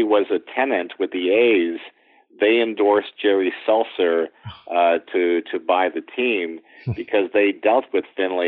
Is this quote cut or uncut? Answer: uncut